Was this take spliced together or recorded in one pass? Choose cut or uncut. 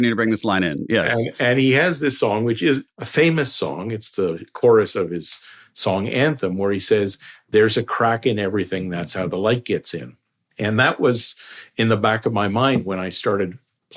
cut